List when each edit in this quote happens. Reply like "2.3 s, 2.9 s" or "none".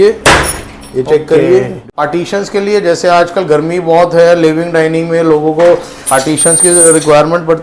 1.8 s